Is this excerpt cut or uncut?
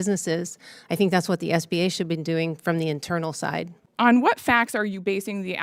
uncut